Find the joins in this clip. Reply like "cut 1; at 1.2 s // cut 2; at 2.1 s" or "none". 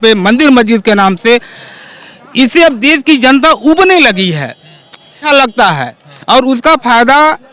cut 1; at 5.2 s